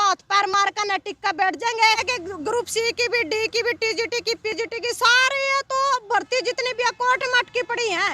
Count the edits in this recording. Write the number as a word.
one